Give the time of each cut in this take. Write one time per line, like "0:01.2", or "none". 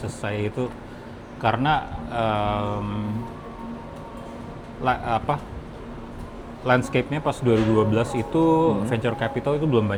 none